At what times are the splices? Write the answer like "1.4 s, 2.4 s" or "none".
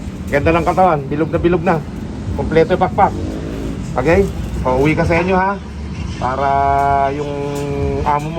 none